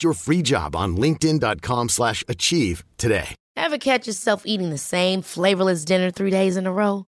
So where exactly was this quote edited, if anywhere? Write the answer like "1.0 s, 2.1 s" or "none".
3.4 s